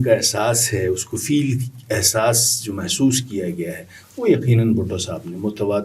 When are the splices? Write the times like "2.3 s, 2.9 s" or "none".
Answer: none